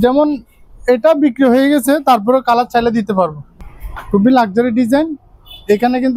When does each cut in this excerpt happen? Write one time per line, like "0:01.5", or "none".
0:03.5